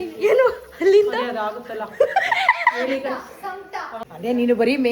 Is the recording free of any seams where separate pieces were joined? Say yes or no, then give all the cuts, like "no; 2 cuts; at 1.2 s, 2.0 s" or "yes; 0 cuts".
no; 1 cut; at 4.0 s